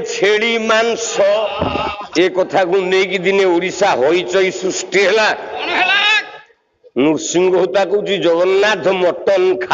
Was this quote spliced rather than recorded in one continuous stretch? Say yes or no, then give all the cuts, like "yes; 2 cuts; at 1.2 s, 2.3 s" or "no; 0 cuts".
yes; 1 cut; at 2.0 s